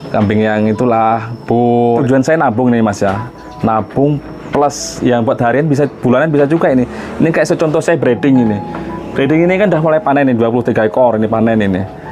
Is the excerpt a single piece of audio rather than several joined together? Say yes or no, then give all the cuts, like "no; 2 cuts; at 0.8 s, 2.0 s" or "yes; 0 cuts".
no; 1 cut; at 2.0 s